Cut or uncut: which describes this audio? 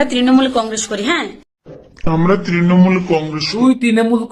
cut